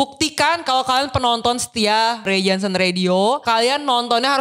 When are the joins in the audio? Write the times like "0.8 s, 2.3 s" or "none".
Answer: 2.3 s, 3.4 s